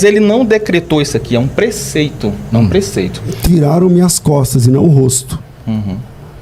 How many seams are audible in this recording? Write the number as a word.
one